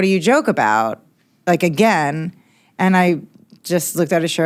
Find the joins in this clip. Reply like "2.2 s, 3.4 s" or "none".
none